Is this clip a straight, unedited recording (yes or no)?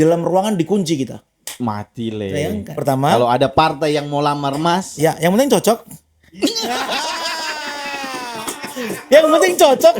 no